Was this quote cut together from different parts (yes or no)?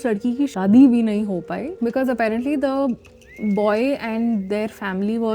no